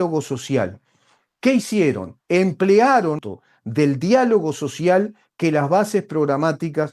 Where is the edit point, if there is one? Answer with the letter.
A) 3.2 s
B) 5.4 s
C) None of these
A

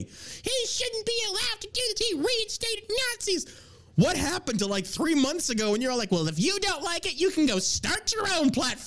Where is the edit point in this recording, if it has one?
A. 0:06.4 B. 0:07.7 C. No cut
C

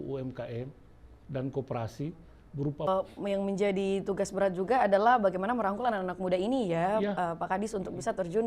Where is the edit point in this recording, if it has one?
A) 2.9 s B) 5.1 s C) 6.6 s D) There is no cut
A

